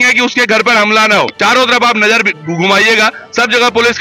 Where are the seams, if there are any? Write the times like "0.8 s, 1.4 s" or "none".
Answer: 1.3 s